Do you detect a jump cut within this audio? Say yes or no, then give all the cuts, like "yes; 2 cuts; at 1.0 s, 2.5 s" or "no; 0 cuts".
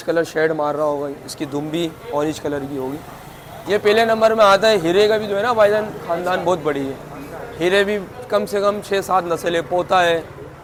no; 0 cuts